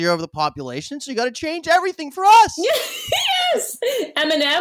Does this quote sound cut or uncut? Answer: cut